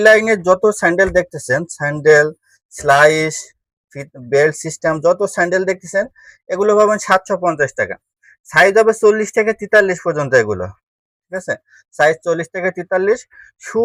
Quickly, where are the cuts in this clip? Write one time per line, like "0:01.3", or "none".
none